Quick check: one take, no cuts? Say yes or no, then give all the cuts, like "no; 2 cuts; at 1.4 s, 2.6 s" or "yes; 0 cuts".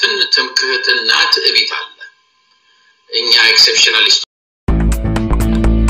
no; 1 cut; at 4.7 s